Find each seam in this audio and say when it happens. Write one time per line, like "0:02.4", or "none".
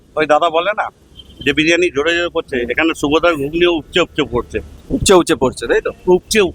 none